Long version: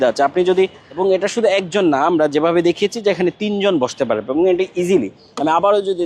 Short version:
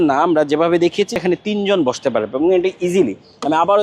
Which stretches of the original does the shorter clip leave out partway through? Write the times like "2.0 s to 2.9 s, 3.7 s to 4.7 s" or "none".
3.0 s to 3.1 s